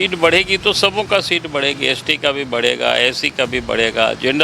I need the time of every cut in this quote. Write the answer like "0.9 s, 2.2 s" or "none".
none